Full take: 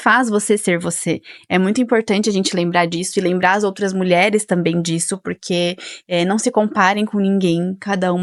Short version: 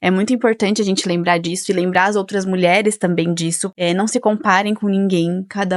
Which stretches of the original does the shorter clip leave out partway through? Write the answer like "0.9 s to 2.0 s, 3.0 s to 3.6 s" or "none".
5.1 s to 6.0 s

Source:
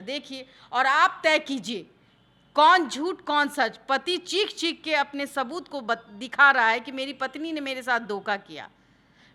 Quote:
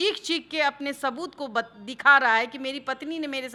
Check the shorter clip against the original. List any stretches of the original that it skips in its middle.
none

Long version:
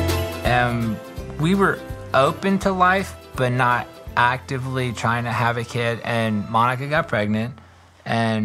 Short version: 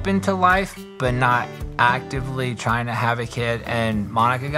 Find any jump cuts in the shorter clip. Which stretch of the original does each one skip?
none

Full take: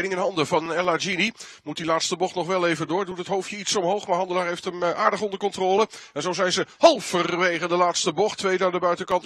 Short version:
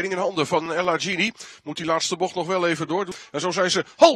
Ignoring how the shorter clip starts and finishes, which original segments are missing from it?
3.2 s to 6.0 s

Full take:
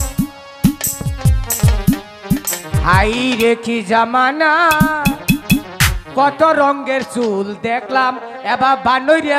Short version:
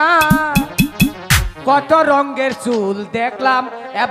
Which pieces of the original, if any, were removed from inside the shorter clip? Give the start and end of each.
none

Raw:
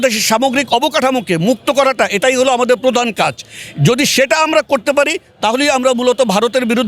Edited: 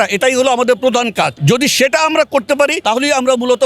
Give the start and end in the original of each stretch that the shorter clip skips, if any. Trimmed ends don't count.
3.4 s to 3.7 s, 5.2 s to 5.4 s

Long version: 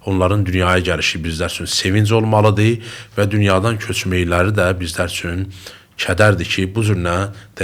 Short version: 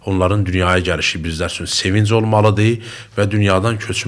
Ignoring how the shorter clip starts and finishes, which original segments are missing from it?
none

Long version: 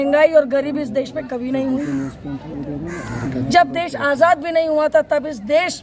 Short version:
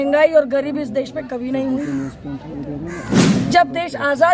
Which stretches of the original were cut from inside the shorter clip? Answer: none

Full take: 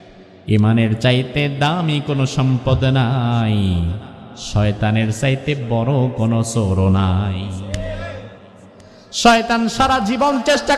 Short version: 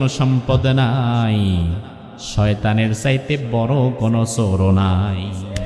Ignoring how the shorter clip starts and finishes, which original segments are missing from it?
none

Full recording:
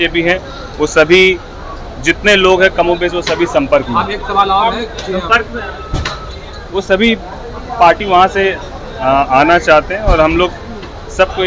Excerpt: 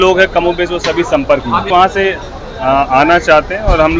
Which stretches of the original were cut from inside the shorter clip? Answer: 4.1 s to 8.1 s

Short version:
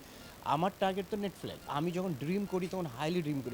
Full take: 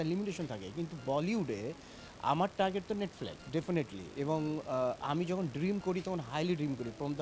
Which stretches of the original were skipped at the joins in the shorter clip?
3.4 s to 5.0 s

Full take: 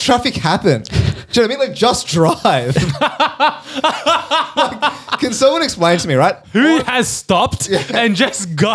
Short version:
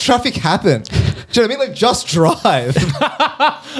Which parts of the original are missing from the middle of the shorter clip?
none

